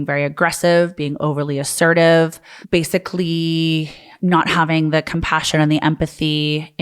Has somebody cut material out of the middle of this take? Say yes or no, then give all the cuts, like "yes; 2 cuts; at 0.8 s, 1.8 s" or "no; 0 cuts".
yes; 1 cut; at 2.5 s